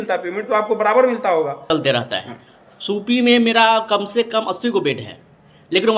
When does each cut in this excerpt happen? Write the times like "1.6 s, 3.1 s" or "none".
1.7 s